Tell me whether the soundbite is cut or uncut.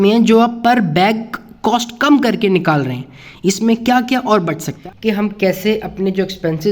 cut